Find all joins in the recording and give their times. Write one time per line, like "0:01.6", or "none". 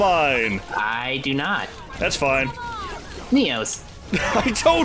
none